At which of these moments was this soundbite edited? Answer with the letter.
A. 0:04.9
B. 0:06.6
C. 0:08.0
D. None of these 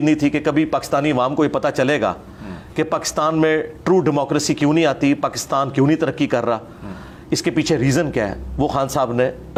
D